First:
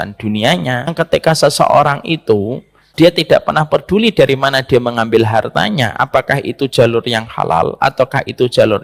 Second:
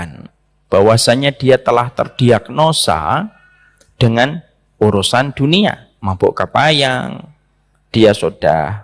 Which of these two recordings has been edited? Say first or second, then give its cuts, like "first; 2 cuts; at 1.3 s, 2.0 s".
first; 2 cuts; at 0.9 s, 2.8 s